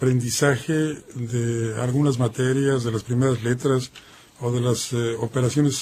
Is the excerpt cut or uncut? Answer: cut